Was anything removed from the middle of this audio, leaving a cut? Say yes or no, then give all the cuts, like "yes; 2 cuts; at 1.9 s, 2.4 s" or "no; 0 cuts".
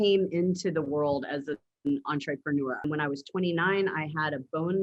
yes; 1 cut; at 2.8 s